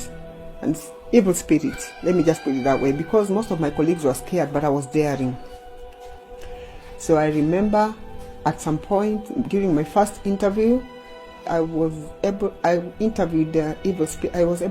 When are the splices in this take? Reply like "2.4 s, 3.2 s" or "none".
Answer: 11.5 s